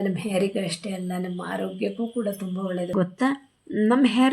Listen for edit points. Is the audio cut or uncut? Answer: cut